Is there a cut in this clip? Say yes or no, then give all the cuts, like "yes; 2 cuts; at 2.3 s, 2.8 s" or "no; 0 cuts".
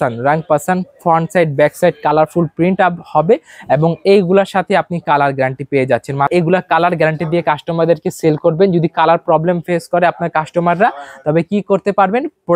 yes; 1 cut; at 6.3 s